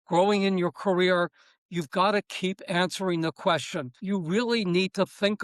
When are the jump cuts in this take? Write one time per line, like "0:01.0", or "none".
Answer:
0:04.0